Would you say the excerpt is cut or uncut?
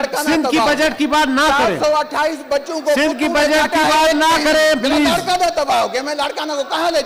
uncut